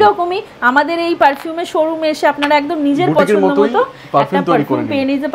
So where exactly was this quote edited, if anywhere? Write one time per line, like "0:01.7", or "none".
none